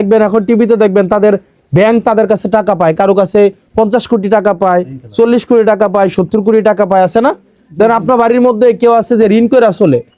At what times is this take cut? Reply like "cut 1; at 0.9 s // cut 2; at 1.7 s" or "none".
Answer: none